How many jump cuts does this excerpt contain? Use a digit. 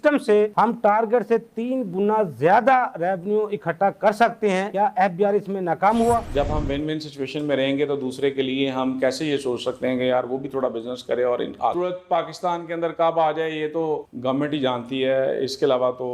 3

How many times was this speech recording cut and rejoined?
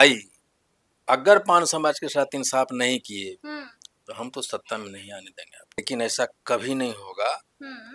1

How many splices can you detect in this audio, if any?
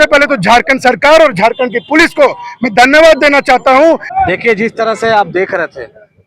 1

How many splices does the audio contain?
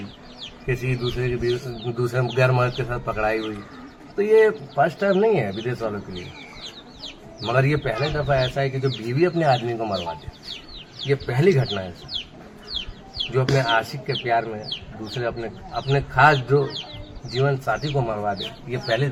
0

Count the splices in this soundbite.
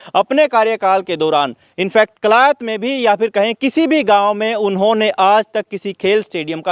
0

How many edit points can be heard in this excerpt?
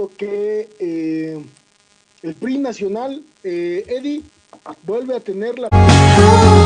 0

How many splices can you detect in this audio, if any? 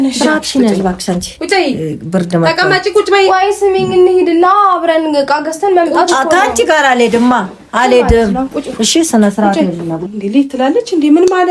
1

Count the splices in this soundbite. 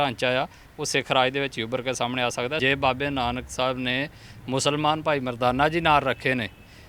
1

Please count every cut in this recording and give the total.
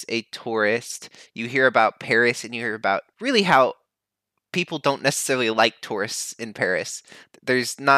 1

